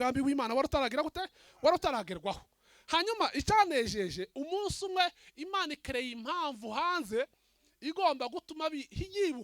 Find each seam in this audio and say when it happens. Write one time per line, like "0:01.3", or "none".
none